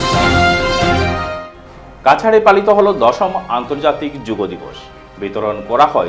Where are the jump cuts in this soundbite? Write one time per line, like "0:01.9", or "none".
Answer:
0:01.1